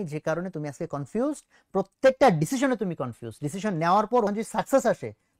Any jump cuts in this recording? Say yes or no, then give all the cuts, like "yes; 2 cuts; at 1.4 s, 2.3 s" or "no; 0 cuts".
no; 0 cuts